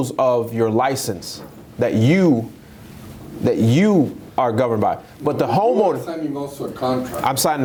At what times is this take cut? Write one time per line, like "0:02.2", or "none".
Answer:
none